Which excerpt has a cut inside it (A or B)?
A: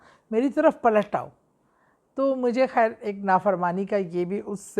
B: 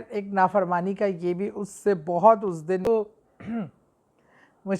B